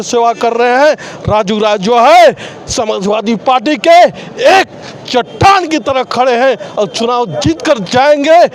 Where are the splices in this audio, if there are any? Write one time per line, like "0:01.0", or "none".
none